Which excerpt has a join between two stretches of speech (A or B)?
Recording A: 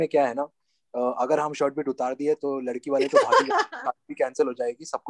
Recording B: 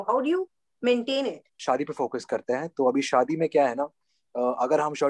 B